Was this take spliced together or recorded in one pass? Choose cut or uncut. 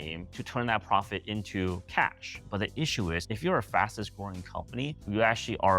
cut